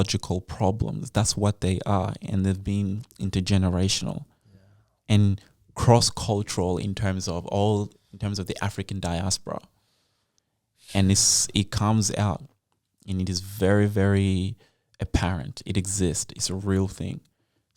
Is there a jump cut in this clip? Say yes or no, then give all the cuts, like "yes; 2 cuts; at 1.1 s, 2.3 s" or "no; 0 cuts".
no; 0 cuts